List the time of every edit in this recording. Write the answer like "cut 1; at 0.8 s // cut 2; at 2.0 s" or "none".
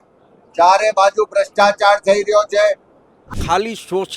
cut 1; at 3.2 s